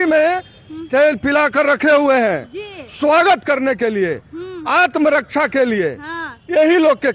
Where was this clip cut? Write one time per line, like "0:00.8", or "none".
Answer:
none

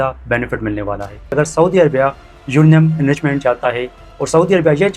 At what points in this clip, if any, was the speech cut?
0:01.3

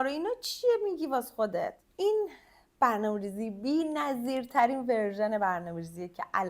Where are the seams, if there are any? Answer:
0:01.8

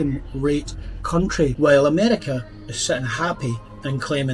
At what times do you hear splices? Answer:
0:01.5

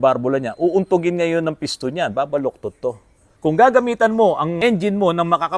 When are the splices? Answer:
0:03.3
0:04.5

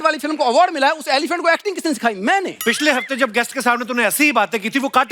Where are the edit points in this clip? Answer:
0:02.6

